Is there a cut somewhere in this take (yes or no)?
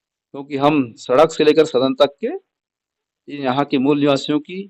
no